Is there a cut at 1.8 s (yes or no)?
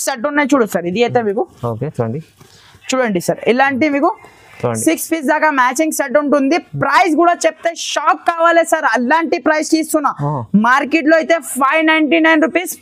no